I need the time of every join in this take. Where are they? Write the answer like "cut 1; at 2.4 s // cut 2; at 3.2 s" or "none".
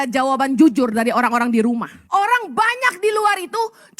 cut 1; at 1.9 s

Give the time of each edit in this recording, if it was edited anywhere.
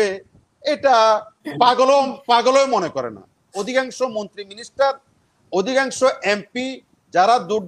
cut 1; at 3.5 s

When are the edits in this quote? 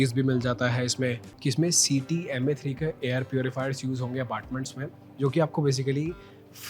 cut 1; at 1.3 s

